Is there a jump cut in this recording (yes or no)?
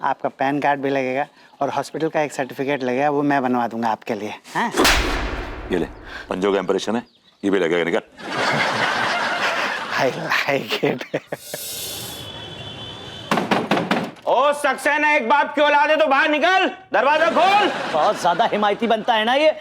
no